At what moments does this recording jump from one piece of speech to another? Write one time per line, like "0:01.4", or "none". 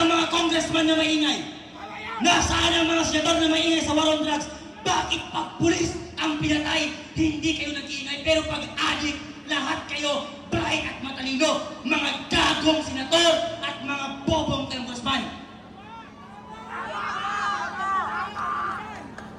none